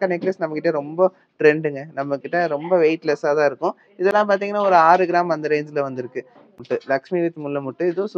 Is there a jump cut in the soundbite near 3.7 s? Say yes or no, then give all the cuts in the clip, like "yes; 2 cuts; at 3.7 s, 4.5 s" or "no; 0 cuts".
no; 0 cuts